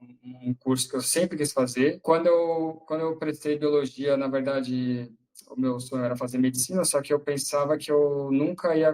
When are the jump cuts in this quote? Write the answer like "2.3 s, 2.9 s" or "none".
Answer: 2.0 s